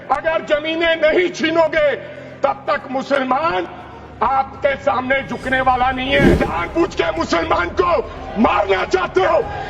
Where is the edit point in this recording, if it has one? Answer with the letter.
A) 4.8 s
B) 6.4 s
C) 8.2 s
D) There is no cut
B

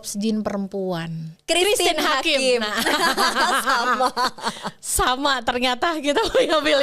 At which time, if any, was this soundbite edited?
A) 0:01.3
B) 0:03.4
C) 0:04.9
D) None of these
A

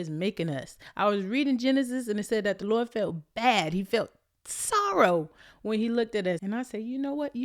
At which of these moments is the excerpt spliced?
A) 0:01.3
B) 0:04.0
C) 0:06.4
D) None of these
C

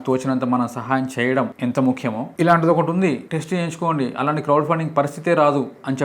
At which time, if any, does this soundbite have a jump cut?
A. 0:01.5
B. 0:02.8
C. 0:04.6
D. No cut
A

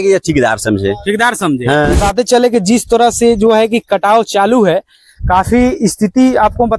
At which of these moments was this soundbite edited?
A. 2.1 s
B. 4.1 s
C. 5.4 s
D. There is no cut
A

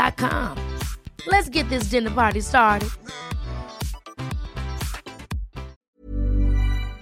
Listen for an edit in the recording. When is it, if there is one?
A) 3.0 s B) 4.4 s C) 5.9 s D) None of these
C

